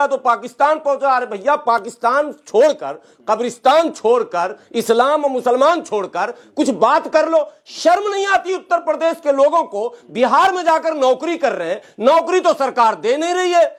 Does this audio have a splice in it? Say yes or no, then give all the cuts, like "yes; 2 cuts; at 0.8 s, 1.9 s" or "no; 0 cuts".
no; 0 cuts